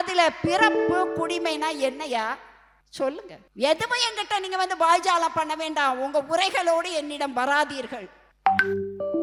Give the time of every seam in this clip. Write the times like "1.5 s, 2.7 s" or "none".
none